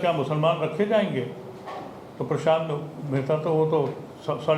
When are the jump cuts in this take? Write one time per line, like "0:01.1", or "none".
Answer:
none